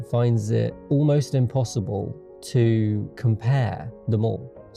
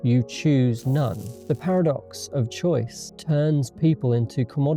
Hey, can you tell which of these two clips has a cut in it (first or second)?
second